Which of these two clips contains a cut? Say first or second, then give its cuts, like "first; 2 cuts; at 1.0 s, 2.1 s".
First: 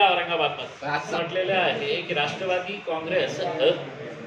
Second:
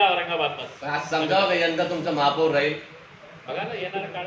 first; 1 cut; at 1.1 s